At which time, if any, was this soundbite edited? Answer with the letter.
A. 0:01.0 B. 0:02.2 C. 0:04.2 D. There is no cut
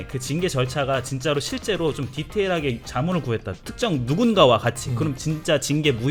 D